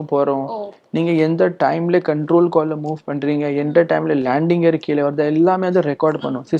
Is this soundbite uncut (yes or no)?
yes